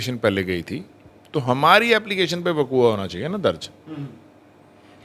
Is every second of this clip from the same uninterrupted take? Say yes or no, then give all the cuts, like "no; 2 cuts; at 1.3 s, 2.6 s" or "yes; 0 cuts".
yes; 0 cuts